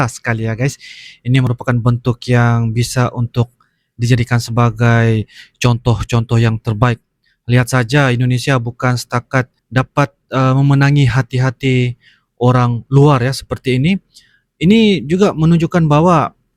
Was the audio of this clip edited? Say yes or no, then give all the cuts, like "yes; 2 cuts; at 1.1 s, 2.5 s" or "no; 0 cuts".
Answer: no; 0 cuts